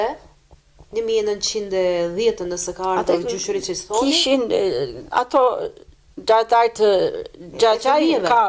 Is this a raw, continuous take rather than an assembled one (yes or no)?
yes